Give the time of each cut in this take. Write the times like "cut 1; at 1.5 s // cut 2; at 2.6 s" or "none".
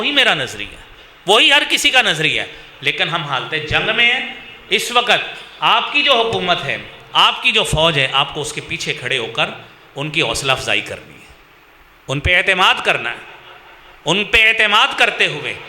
none